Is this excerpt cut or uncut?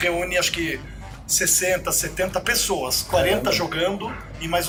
uncut